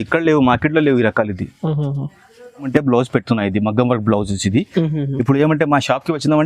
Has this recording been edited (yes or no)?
yes